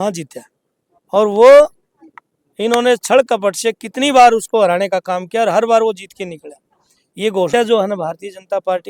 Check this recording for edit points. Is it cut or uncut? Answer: cut